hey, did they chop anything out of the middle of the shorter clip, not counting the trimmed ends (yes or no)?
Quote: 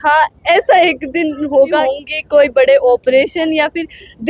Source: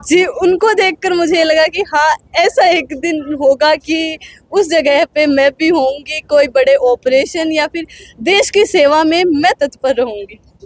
yes